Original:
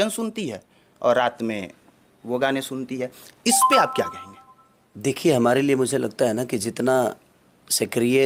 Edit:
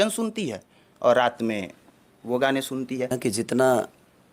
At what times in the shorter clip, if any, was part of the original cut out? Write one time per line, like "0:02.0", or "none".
0:03.1

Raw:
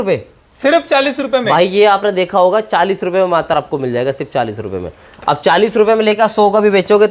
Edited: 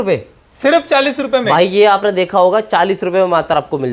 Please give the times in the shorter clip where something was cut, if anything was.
none

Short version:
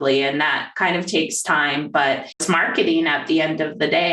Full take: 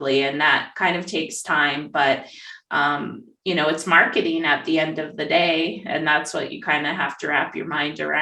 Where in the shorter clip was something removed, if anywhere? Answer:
0:02.4

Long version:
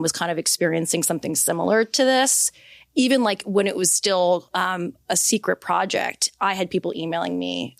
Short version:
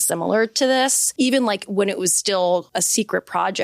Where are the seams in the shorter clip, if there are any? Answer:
0:01.0
0:02.7

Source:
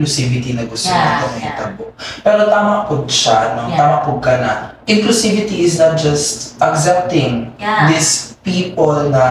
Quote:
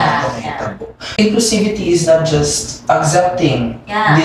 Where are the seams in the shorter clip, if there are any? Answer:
0:01.0

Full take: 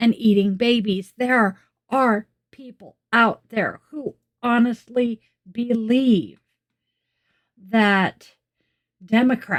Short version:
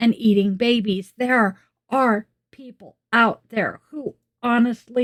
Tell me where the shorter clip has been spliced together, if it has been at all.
none

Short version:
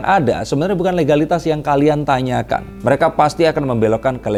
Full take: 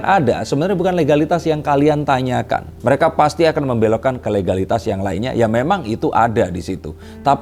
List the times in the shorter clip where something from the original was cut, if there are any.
none

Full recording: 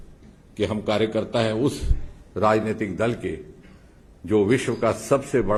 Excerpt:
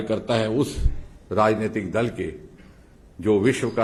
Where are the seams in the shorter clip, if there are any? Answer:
none

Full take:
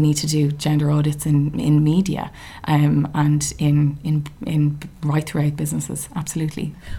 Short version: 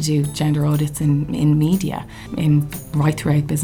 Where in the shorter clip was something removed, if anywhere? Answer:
0:02.2

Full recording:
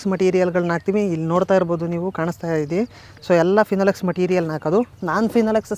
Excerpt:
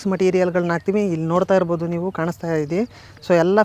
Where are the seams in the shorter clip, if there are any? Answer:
none

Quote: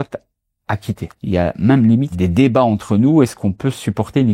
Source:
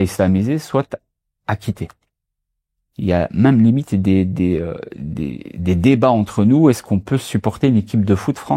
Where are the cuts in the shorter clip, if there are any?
0:01.1
0:02.1

